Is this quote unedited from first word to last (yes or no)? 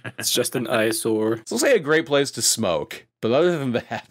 no